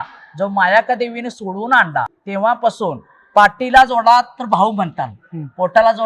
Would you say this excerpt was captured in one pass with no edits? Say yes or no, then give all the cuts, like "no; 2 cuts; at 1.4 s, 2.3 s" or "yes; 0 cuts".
no; 1 cut; at 2.2 s